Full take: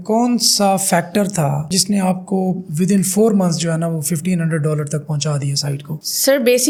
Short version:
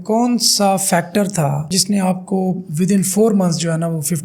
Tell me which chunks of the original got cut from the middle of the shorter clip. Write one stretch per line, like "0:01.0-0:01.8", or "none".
none